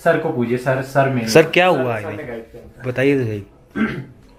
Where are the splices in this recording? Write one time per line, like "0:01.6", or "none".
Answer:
none